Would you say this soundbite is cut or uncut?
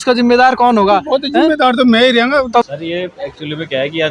cut